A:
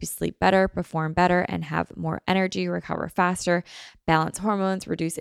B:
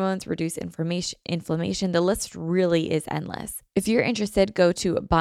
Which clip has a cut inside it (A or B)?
B